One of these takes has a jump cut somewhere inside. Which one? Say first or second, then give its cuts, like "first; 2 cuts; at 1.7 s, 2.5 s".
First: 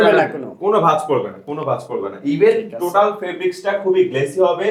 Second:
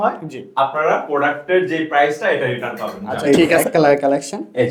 second; 1 cut; at 3.6 s